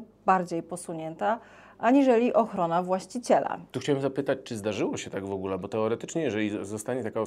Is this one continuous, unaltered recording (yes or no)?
no